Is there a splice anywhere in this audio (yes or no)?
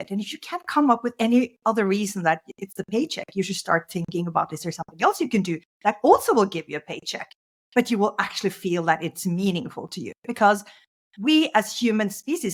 no